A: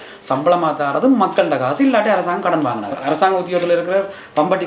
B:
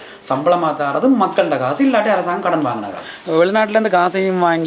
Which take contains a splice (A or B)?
B